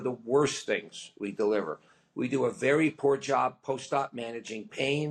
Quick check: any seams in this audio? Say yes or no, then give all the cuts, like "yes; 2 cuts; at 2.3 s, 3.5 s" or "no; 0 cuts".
no; 0 cuts